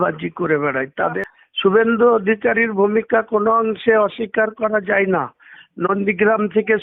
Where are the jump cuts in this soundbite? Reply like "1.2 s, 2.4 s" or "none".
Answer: 1.2 s